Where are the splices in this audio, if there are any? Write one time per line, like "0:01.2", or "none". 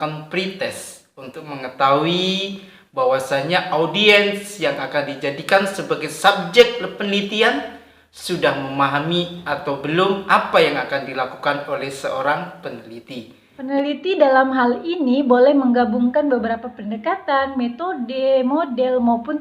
0:13.4